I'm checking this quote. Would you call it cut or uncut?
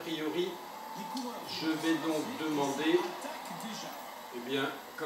cut